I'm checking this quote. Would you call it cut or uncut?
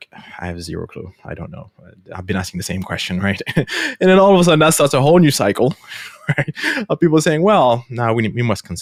uncut